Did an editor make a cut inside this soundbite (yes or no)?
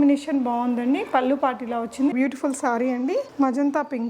yes